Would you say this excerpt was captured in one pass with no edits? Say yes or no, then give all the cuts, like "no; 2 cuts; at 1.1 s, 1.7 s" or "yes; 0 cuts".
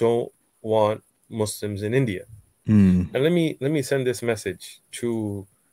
yes; 0 cuts